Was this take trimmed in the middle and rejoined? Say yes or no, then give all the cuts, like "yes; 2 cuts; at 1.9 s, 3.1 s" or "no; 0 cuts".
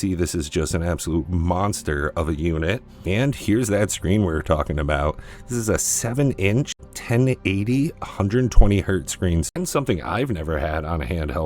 yes; 3 cuts; at 3.0 s, 6.9 s, 9.5 s